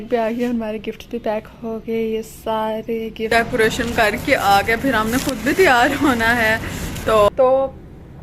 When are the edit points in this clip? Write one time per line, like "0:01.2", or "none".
0:03.3
0:07.3